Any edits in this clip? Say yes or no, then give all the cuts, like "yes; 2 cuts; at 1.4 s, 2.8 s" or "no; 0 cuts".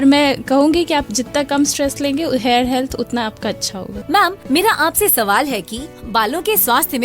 yes; 2 cuts; at 4.0 s, 5.5 s